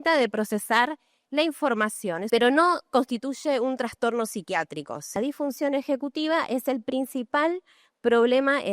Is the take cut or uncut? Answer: cut